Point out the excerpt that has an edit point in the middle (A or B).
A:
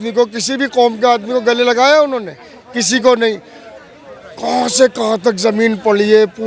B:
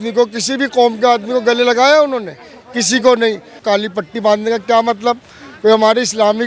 B